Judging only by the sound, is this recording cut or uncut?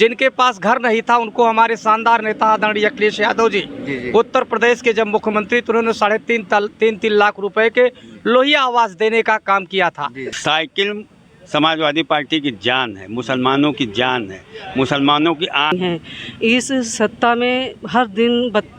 cut